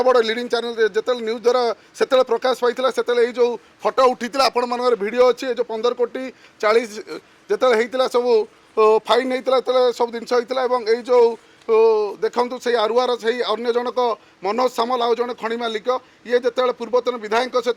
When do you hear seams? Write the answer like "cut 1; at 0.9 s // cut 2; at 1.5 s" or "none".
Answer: none